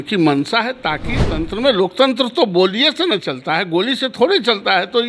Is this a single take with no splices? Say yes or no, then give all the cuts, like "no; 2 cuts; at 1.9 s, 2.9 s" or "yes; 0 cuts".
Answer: no; 1 cut; at 1.2 s